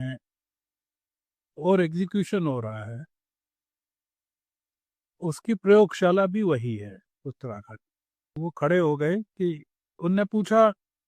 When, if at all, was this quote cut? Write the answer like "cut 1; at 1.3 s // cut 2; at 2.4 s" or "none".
cut 1; at 8.4 s